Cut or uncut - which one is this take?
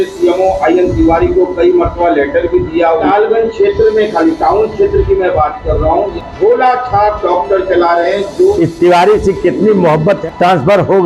cut